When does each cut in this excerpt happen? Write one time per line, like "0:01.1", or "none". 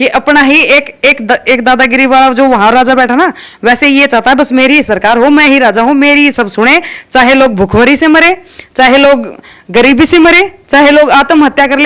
none